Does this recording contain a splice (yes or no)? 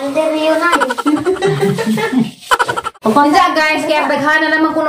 yes